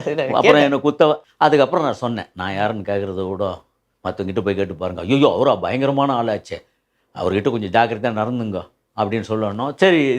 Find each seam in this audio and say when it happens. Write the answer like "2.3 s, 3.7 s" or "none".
1.3 s